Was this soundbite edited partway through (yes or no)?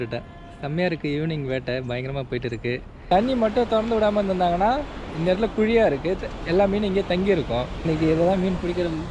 yes